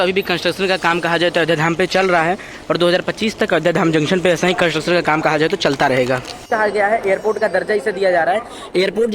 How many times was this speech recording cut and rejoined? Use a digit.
1